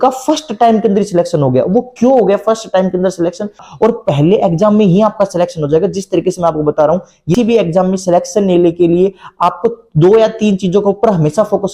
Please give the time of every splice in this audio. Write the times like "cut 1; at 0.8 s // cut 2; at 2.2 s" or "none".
cut 1; at 3.7 s // cut 2; at 7.3 s